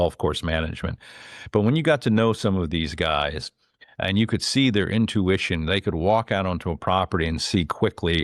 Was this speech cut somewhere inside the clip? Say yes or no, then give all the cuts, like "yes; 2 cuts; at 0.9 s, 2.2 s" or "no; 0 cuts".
no; 0 cuts